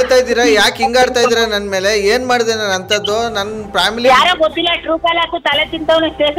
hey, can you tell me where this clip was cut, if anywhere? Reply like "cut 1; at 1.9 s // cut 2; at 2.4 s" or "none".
none